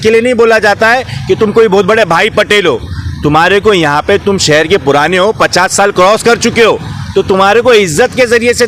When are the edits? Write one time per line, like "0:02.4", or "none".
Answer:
none